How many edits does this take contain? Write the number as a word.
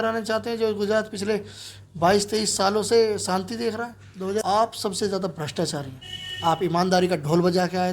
one